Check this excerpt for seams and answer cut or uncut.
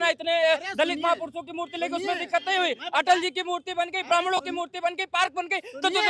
uncut